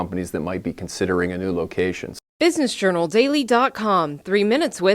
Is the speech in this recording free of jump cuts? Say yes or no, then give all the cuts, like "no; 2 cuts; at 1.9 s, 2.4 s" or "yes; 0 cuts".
no; 1 cut; at 2.1 s